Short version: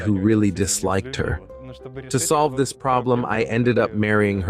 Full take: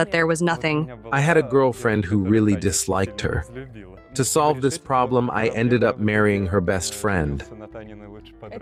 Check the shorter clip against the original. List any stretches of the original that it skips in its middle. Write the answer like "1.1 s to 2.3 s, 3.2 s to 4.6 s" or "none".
none